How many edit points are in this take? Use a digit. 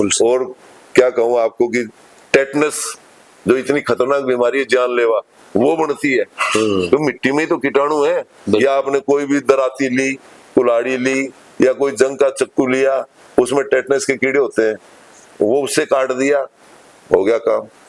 0